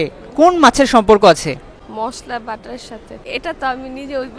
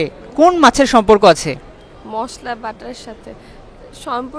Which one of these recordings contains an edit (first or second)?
first